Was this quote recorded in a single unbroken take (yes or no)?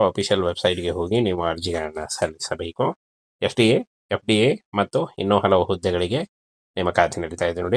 yes